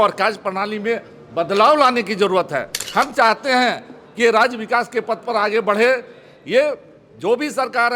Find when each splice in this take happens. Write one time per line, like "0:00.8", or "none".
0:02.8

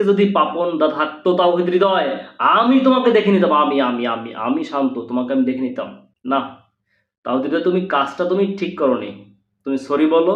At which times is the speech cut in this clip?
none

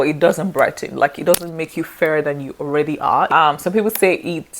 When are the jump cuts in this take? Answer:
0:03.3

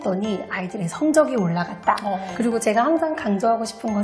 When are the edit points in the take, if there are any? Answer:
none

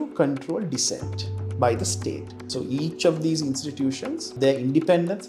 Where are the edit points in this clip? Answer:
0:02.3
0:04.3

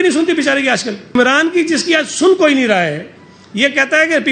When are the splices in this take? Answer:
0:01.2

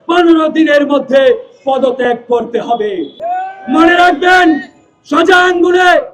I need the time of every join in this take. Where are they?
0:03.2

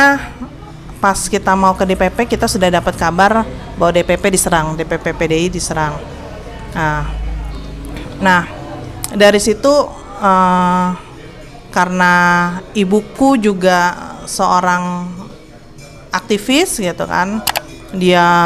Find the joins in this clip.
none

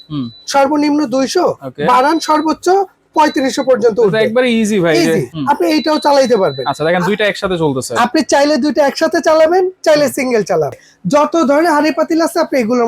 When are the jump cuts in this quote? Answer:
0:05.3
0:10.8

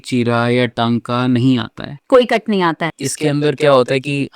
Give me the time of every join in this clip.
0:02.8

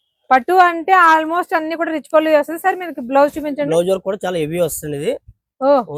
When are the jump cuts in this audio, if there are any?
none

